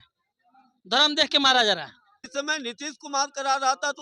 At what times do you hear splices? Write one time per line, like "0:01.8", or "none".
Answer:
0:02.2